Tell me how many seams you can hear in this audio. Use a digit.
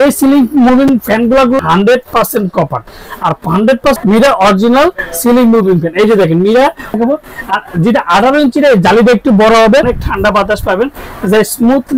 4